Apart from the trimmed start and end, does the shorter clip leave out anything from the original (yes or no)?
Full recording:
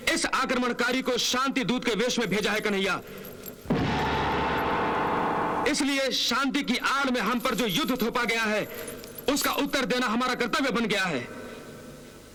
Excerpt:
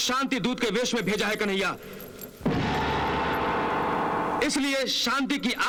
no